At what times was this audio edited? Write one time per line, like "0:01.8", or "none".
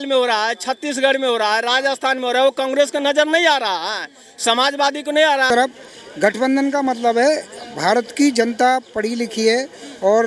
0:05.4